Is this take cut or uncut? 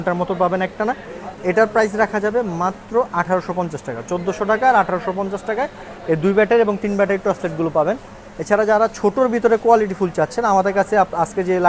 uncut